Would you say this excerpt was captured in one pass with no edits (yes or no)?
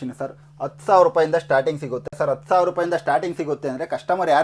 yes